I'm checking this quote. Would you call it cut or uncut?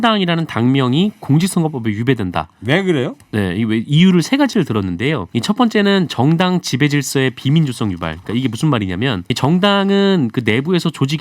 cut